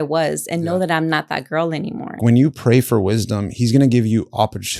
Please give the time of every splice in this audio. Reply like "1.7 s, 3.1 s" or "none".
2.2 s